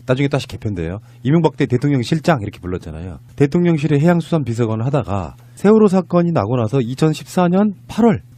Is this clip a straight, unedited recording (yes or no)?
no